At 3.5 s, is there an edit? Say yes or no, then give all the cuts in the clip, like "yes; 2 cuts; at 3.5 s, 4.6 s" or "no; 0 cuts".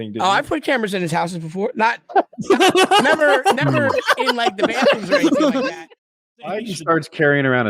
no; 1 cut; at 5.8 s